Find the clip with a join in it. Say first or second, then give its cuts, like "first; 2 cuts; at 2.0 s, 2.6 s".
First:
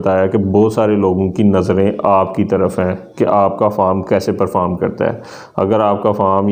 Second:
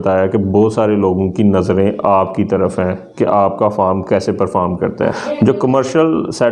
second; 1 cut; at 5.2 s